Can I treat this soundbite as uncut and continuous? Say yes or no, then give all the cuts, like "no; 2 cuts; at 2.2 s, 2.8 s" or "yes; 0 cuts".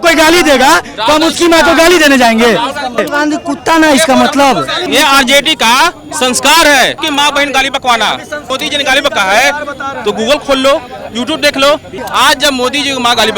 no; 5 cuts; at 3.0 s, 4.8 s, 7.0 s, 8.5 s, 11.9 s